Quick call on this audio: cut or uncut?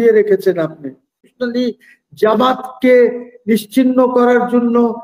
cut